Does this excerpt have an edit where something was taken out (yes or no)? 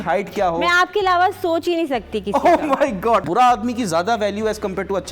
yes